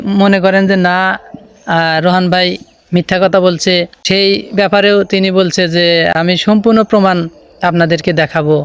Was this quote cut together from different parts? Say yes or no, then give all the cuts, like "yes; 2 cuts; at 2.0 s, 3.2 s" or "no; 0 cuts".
yes; 2 cuts; at 3.9 s, 6.1 s